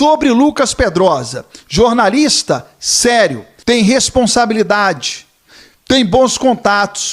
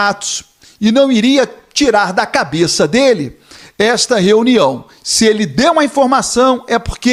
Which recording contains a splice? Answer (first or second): first